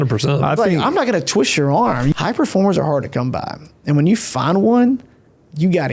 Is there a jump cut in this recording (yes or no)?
yes